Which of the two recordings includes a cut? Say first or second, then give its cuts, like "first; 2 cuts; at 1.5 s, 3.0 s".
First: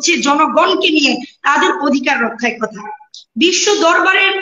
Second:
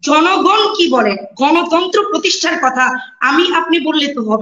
first; 1 cut; at 3.0 s